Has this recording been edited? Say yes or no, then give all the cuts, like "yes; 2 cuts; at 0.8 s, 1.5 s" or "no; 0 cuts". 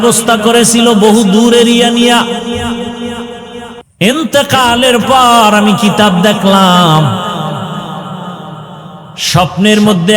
yes; 1 cut; at 3.8 s